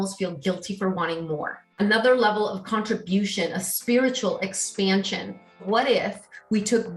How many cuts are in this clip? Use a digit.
2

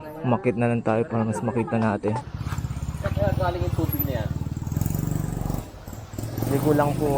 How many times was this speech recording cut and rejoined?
1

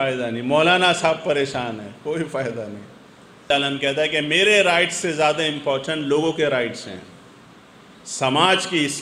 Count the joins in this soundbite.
1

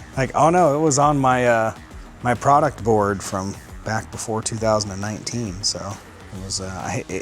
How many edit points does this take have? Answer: 1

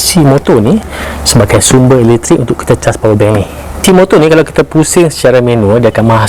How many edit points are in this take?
1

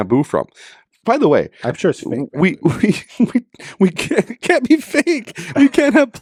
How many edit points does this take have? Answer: 0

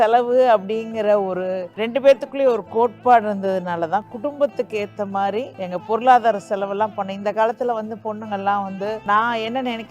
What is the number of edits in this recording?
1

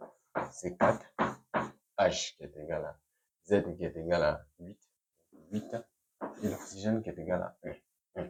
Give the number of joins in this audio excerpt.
0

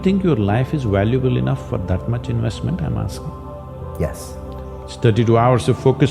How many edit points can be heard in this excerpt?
1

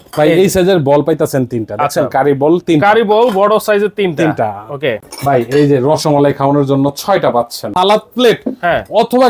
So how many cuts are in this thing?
1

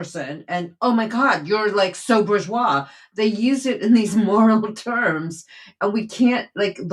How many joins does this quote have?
0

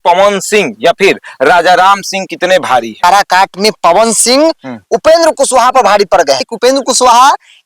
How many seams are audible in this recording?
2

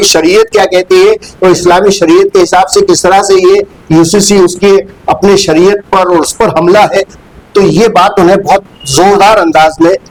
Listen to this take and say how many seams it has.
0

